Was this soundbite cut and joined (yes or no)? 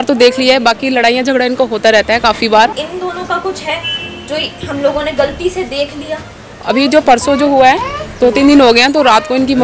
yes